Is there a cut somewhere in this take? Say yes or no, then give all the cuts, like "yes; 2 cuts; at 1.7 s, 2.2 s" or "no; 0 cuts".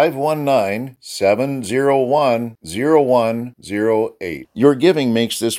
no; 0 cuts